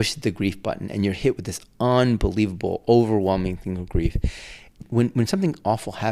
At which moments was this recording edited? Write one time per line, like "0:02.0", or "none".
0:04.8